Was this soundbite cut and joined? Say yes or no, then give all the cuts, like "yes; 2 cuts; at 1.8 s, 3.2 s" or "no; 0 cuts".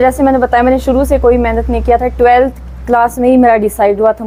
no; 0 cuts